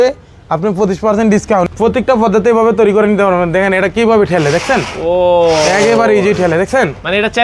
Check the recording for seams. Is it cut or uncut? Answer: cut